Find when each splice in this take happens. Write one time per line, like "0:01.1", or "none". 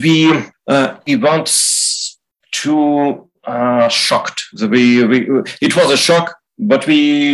0:01.0

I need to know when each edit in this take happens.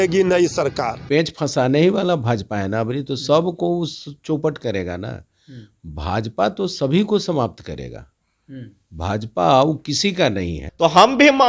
0:01.0
0:10.6

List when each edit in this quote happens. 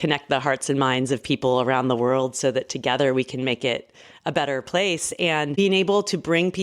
0:05.5

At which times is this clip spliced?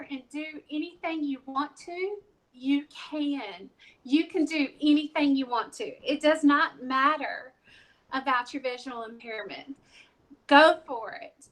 none

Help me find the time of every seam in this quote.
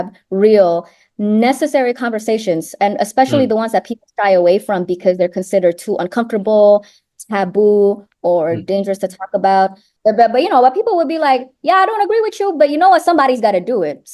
0:09.9

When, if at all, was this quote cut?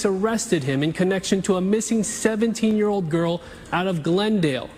none

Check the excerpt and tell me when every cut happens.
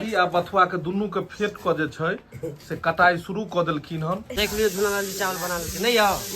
0:04.3

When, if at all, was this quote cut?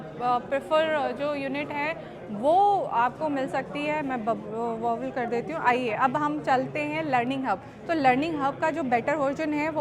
none

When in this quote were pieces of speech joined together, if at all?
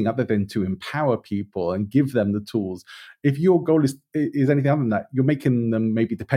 none

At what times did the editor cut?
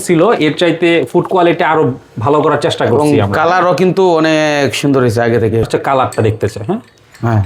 0:05.7

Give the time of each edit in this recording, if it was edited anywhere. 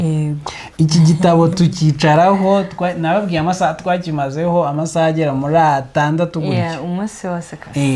none

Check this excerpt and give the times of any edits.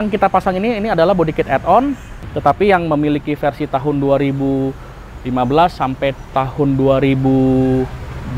0:02.3

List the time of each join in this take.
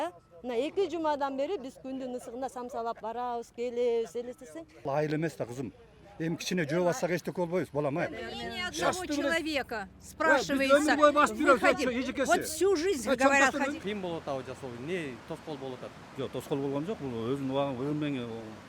0:04.8
0:08.2
0:13.6

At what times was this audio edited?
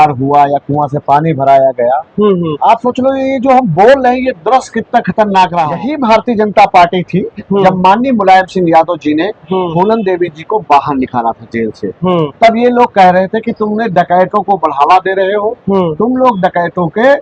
0:05.8

